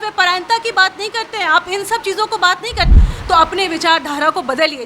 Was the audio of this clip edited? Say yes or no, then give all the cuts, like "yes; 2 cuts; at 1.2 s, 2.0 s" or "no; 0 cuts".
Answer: yes; 1 cut; at 3.0 s